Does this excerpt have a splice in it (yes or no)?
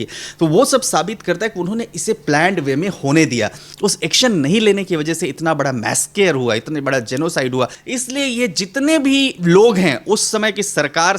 yes